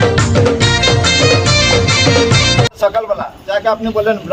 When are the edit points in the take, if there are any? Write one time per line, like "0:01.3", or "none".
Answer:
0:02.7